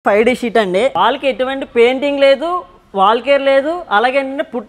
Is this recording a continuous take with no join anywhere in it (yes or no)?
no